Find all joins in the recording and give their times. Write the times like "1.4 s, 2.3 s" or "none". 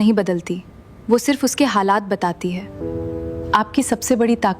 2.8 s